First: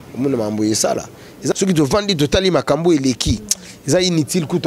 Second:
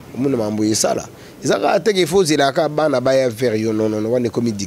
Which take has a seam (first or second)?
first